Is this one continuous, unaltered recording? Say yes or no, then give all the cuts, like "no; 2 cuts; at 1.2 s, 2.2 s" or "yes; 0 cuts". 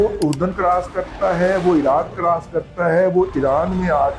yes; 0 cuts